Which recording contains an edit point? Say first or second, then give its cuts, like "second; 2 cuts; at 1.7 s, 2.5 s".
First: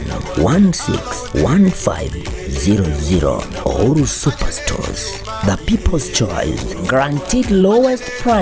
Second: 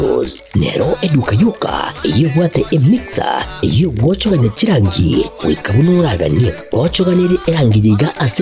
second; 1 cut; at 5.2 s